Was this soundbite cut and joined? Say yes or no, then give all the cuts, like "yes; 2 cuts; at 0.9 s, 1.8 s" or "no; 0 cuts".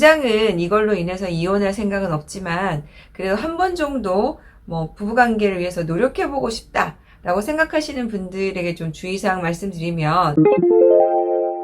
yes; 1 cut; at 10.3 s